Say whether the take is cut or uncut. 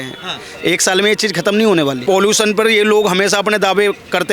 cut